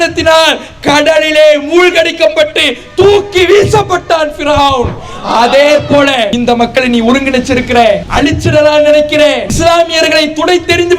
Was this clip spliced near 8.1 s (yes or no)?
yes